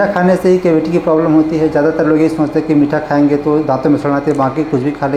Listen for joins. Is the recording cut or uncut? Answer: uncut